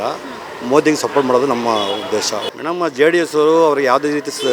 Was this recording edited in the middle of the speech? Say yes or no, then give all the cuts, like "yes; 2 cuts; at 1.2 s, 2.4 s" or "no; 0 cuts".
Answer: yes; 1 cut; at 2.4 s